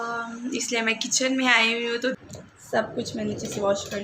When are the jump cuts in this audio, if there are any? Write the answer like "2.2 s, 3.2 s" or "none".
2.2 s